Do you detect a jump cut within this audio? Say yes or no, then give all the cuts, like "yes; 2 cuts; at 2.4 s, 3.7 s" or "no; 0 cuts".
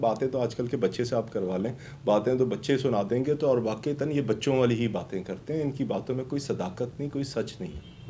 no; 0 cuts